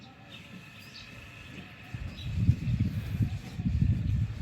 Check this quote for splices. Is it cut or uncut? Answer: uncut